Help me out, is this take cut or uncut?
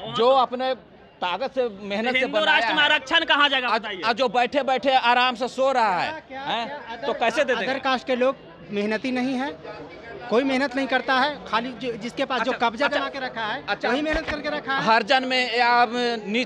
uncut